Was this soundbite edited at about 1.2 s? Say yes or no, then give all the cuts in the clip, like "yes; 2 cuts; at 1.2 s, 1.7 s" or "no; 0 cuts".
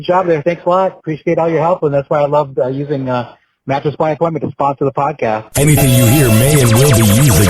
no; 1 cut; at 5.5 s